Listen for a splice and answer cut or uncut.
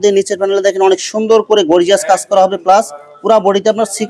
uncut